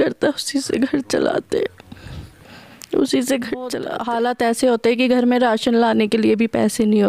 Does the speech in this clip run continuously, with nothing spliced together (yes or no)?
no